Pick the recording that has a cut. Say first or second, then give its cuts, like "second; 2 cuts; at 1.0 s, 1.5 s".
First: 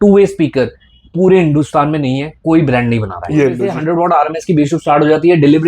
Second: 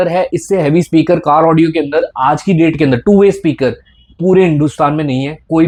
first; 1 cut; at 3.7 s